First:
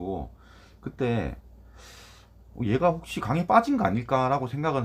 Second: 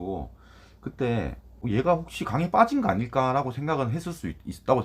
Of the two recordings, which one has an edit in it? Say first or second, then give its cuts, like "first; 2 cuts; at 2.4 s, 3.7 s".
second; 1 cut; at 1.5 s